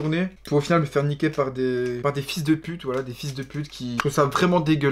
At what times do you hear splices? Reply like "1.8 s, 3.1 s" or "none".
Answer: 4.0 s

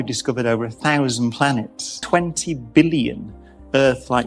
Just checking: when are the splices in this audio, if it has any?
1.9 s

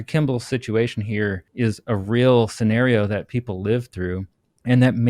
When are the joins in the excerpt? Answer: 1.4 s

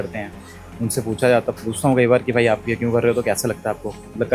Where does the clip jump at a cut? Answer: none

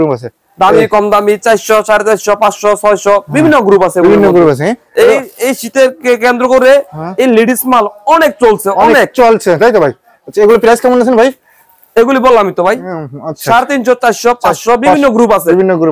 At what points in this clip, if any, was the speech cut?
none

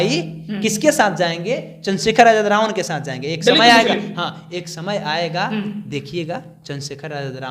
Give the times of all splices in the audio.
none

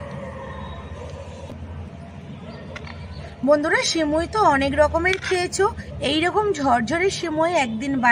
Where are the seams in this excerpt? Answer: 5.9 s

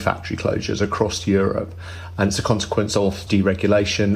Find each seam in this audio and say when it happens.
3.2 s

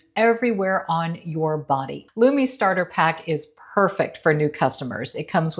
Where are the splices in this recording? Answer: 2.0 s

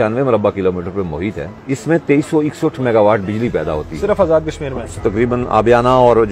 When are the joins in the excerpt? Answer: 1.5 s, 4.9 s

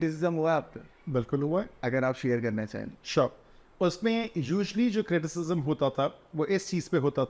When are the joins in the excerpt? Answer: none

